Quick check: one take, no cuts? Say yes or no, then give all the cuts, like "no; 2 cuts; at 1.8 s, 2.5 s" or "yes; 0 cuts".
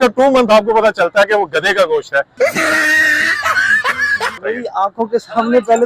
no; 1 cut; at 4.3 s